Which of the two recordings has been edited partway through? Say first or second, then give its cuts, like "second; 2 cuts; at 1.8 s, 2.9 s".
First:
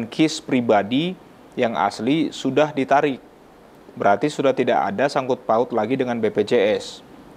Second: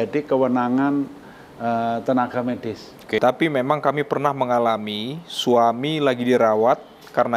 second; 1 cut; at 3.2 s